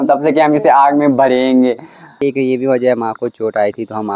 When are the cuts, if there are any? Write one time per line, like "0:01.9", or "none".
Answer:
0:02.2